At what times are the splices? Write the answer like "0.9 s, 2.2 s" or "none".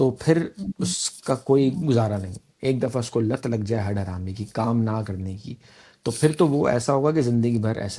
none